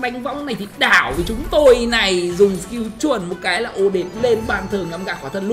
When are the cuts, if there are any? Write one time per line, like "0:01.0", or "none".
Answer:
none